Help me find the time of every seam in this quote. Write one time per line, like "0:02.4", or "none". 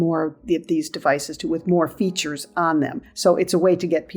0:03.0